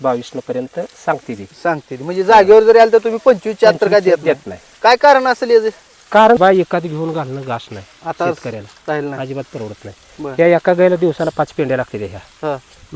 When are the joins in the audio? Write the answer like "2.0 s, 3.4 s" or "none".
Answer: 6.4 s